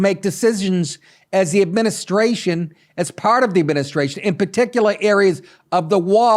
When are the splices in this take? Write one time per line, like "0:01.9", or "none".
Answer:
none